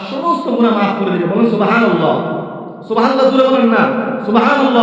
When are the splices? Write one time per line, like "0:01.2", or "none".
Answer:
0:01.4